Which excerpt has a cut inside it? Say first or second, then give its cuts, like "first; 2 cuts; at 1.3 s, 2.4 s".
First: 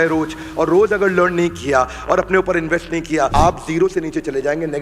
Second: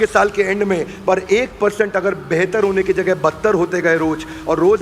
first; 1 cut; at 3.3 s